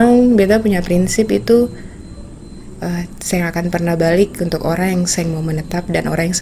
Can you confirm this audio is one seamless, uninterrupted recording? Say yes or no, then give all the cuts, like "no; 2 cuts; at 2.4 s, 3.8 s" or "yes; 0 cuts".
yes; 0 cuts